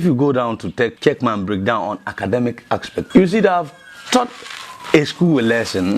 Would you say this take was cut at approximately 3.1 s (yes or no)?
yes